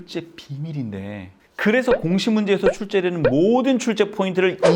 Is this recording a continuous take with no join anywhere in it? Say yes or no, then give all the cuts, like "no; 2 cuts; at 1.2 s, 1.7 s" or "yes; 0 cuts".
no; 1 cut; at 1.5 s